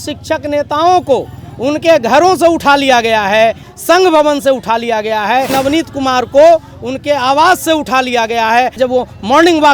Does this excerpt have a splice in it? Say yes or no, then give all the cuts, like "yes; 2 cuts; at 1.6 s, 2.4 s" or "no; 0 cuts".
yes; 3 cuts; at 3.7 s, 5.5 s, 8.8 s